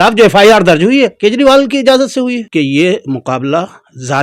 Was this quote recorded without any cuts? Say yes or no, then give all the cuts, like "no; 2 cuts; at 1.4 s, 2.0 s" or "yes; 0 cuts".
no; 1 cut; at 2.5 s